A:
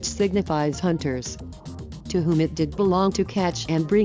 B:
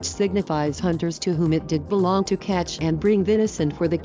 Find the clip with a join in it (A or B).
B